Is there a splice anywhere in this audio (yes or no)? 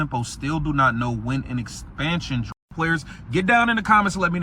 yes